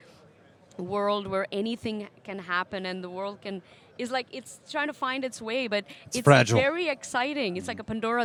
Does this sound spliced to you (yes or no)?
no